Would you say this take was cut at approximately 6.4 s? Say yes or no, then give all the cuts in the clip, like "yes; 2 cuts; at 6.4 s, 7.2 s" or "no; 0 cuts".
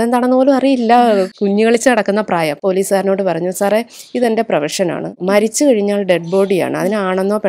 no; 3 cuts; at 1.3 s, 2.6 s, 5.1 s